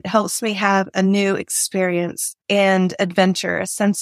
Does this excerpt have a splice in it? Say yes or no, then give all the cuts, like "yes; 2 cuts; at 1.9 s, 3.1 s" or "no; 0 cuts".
yes; 1 cut; at 2.3 s